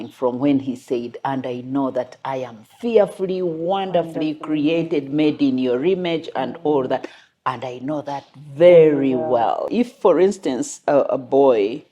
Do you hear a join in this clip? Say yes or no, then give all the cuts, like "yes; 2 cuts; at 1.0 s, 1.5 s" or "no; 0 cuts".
yes; 1 cut; at 9.7 s